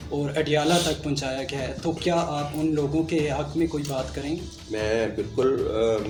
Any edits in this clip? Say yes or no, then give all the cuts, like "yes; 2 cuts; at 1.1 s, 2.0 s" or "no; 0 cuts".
no; 0 cuts